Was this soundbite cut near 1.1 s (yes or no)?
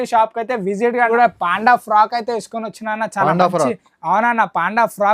yes